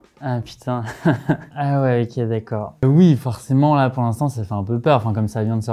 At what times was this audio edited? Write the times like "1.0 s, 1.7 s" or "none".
2.8 s